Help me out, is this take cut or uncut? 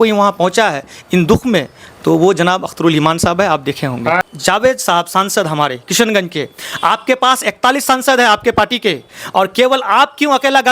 cut